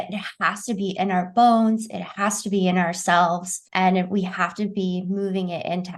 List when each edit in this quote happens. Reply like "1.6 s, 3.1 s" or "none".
none